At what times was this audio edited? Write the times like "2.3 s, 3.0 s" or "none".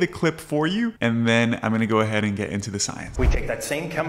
1.0 s, 3.1 s